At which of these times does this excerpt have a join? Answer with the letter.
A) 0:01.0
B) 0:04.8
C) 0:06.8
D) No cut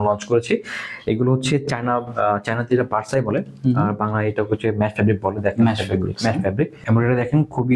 C